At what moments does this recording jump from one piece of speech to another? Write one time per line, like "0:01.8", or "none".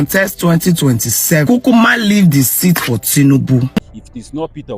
0:03.8